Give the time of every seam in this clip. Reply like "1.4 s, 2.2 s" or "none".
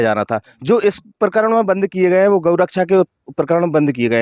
none